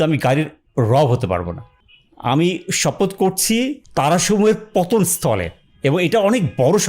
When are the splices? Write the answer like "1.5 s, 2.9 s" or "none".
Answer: 1.8 s, 3.8 s